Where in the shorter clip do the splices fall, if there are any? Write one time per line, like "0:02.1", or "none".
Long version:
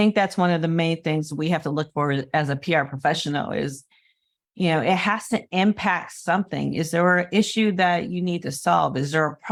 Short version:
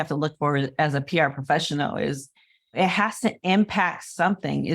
0:02.8